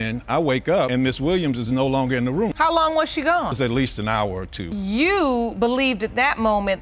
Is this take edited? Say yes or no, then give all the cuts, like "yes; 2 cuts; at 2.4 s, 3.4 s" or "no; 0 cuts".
no; 0 cuts